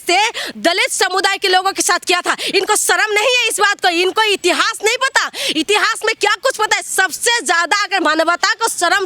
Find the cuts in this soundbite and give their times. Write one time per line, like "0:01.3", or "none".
none